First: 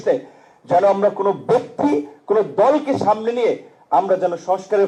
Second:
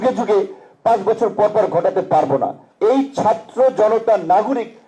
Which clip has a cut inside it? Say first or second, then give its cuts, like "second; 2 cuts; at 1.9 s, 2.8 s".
second; 1 cut; at 2.6 s